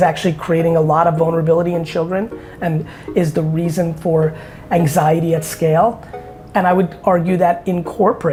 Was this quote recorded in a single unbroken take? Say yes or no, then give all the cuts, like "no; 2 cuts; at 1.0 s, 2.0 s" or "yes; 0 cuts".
yes; 0 cuts